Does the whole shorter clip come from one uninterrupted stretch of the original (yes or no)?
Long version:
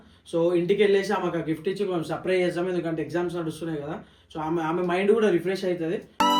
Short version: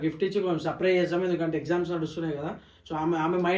yes